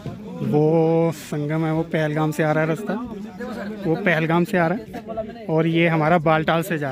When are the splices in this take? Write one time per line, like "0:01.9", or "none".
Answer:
none